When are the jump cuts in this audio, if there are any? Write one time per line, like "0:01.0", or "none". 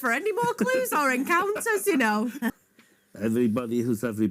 0:02.6